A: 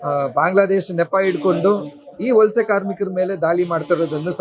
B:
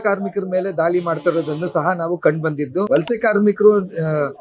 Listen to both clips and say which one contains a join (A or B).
B